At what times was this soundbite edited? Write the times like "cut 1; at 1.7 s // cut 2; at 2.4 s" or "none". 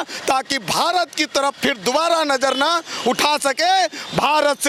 none